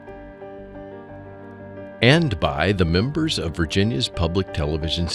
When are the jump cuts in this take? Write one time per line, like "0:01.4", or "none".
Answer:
0:02.0